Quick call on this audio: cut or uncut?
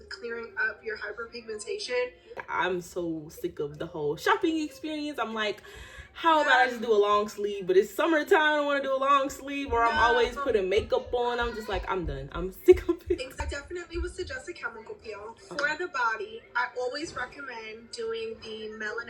uncut